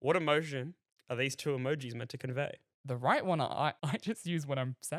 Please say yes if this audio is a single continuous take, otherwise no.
no